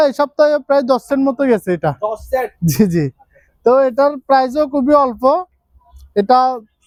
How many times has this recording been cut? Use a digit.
0